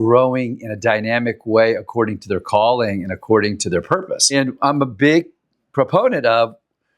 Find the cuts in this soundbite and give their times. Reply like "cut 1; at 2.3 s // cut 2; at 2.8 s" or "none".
cut 1; at 4.3 s